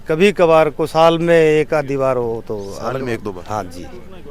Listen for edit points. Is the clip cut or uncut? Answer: uncut